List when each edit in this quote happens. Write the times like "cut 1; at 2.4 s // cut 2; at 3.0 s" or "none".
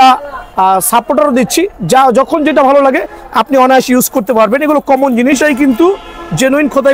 cut 1; at 5.4 s